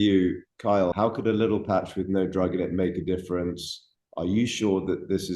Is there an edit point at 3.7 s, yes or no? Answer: no